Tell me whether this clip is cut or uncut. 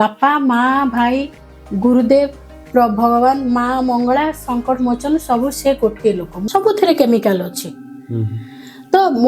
cut